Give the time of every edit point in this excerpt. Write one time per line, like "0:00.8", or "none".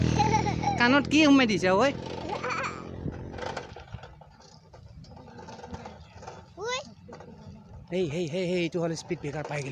0:03.7